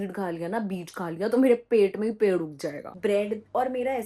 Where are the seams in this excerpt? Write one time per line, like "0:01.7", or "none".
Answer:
0:03.0